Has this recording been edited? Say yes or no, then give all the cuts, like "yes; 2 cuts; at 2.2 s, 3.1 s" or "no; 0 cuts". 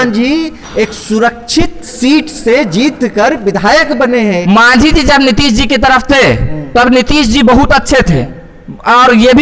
yes; 1 cut; at 4.3 s